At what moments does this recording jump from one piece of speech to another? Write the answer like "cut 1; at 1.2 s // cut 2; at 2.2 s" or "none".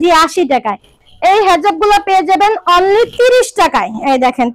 cut 1; at 0.9 s